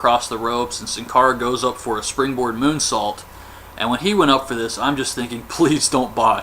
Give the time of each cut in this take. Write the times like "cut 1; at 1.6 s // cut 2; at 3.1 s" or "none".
cut 1; at 2.1 s